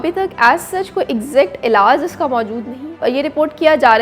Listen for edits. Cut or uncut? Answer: cut